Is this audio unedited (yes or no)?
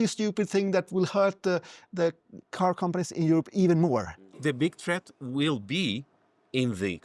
no